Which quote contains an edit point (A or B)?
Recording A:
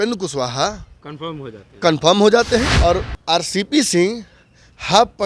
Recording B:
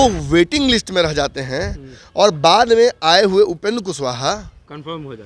A